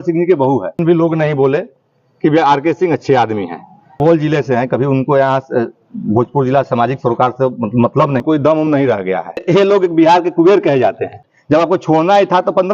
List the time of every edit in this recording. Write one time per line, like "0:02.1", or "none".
0:00.8
0:04.0
0:08.2
0:09.4
0:11.3